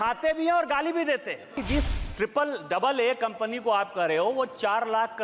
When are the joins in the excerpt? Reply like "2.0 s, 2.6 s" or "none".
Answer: 1.6 s